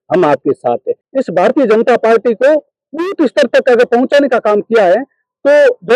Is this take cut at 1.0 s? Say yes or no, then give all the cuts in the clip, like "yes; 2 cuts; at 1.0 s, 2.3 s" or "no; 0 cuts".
yes; 1 cut; at 1.0 s